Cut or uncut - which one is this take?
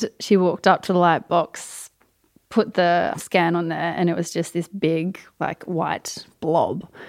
cut